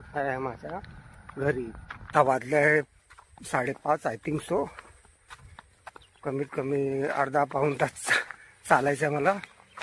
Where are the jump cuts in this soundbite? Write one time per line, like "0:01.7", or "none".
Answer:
0:02.1